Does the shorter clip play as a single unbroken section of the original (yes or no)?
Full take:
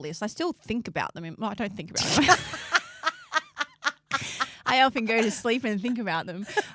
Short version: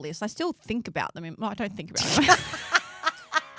yes